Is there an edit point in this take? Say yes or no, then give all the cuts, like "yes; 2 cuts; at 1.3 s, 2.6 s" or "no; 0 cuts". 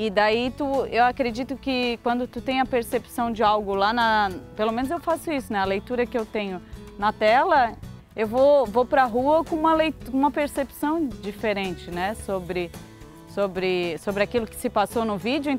no; 0 cuts